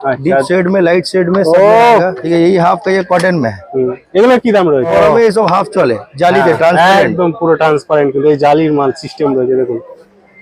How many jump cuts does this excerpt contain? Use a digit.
2